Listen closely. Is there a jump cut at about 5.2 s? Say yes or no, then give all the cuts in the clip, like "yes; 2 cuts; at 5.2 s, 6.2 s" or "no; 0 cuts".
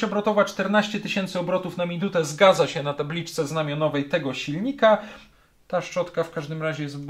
yes; 1 cut; at 5.2 s